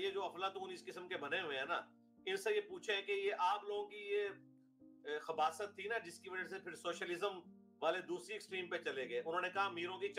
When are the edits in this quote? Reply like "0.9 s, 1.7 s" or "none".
none